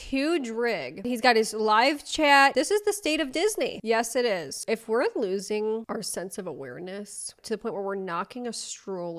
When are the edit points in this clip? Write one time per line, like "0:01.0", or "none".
0:01.1
0:02.5
0:04.5